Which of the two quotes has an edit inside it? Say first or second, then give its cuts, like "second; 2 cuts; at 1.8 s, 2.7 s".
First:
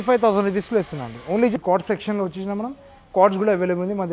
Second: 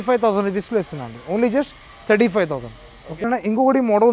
first; 1 cut; at 1.6 s